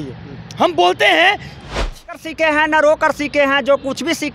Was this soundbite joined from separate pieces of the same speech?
yes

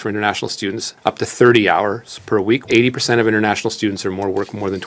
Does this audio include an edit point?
yes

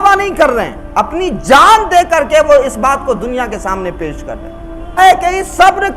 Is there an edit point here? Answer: yes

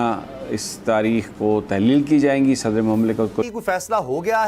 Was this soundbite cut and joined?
yes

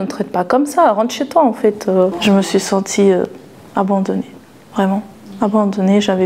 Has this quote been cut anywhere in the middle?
no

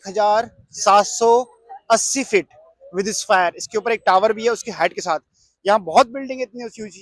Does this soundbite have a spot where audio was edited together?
no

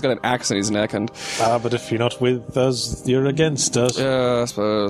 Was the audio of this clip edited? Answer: no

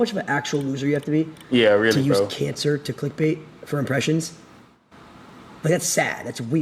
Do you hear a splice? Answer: no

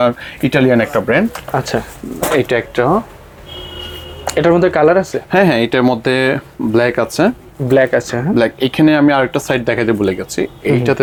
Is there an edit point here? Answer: no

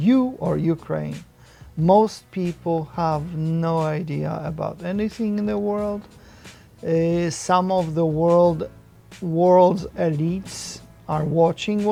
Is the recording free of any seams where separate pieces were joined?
yes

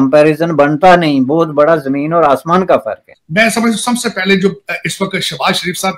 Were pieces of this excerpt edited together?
yes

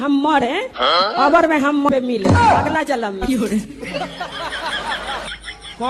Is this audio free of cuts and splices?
no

